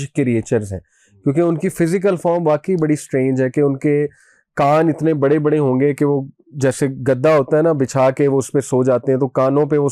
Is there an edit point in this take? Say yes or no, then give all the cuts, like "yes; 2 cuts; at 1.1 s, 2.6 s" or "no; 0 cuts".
no; 0 cuts